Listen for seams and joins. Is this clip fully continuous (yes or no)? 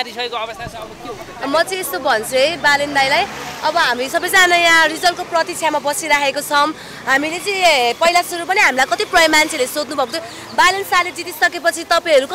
yes